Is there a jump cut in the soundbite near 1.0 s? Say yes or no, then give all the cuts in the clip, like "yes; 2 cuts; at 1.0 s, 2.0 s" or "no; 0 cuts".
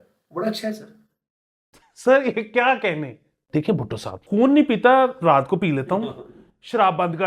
no; 2 cuts; at 3.4 s, 4.1 s